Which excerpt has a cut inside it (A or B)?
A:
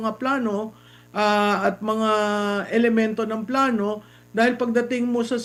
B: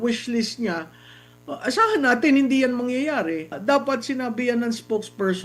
B